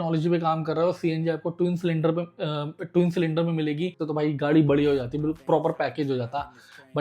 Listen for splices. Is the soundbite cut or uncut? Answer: cut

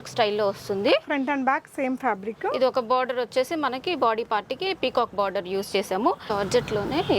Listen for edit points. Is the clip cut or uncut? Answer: cut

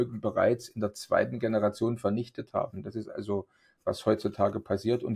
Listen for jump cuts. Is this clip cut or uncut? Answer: uncut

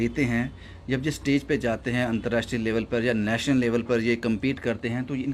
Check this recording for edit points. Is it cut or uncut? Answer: uncut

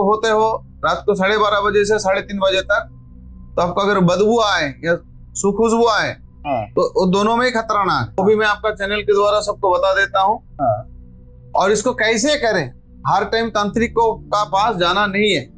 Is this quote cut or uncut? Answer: cut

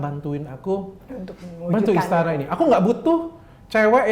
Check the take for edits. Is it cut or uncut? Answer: uncut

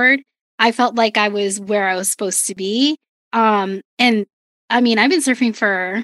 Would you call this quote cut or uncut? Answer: uncut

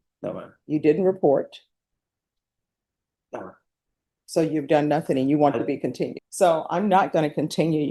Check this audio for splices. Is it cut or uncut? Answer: cut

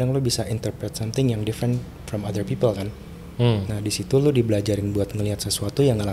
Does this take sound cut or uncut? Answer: uncut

